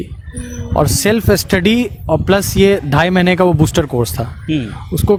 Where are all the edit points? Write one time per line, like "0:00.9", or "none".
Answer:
none